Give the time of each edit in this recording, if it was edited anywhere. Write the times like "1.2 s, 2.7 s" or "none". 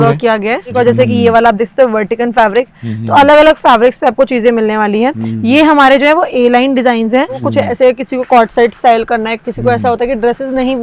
0.7 s, 7.5 s